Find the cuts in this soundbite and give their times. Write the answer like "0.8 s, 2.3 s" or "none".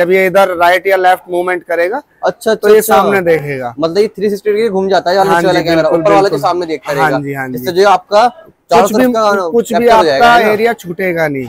none